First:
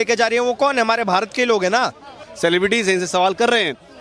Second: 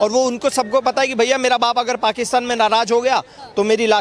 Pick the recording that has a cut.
first; 1 cut; at 2.3 s

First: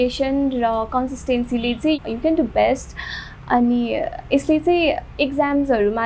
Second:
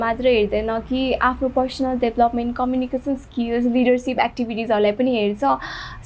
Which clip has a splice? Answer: first; 1 cut; at 2.0 s

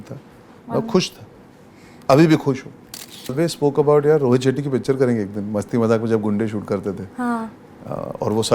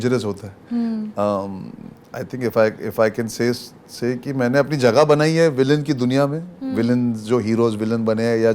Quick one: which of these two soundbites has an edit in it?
first; 1 cut; at 3.3 s

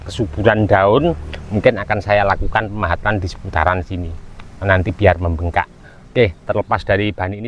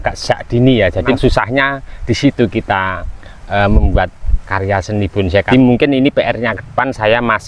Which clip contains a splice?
second; 2 cuts; at 1.1 s, 5.5 s

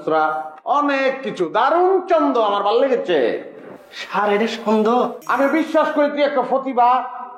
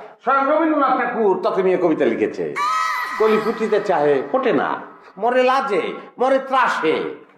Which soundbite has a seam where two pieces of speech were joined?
first; 1 cut; at 5.2 s

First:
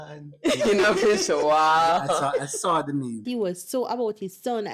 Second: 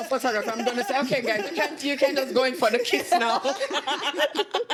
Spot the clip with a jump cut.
first; 1 cut; at 3.2 s

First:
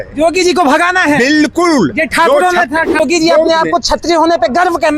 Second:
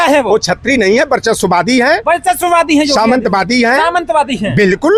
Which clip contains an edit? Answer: first; 1 cut; at 3.0 s

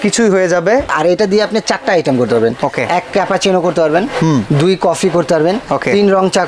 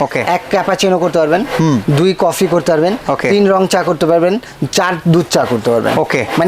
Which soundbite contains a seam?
first; 1 cut; at 0.9 s

